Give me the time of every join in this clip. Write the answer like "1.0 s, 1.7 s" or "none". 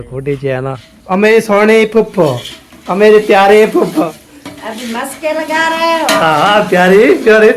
0.9 s, 4.0 s